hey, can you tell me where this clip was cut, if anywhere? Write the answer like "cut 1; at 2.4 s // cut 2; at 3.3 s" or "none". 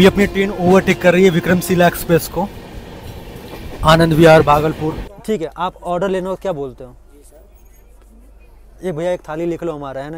cut 1; at 5.1 s